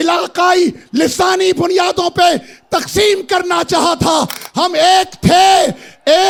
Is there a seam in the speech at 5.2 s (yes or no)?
no